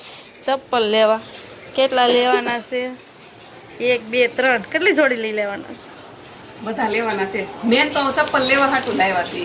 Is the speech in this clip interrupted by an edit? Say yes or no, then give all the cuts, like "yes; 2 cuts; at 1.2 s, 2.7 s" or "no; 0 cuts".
no; 0 cuts